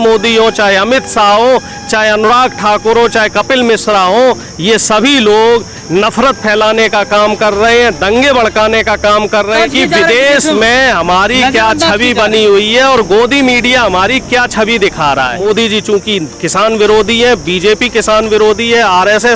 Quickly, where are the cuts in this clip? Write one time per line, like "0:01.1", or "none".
0:09.6
0:15.4